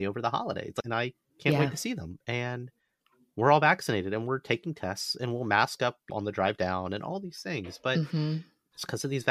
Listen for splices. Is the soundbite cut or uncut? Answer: cut